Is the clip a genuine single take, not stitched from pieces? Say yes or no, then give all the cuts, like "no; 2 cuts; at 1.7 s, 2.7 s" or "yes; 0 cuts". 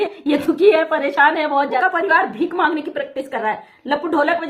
no; 1 cut; at 1.8 s